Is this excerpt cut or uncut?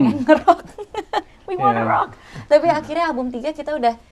uncut